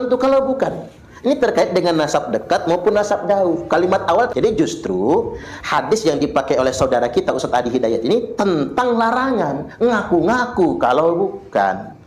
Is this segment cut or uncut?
cut